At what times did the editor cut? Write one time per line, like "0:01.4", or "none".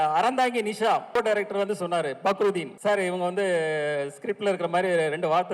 0:01.2
0:02.7